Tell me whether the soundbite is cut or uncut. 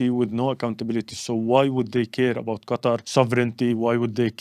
cut